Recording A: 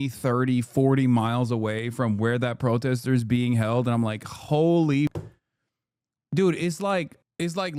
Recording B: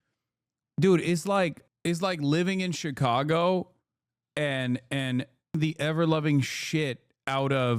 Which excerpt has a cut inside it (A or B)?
B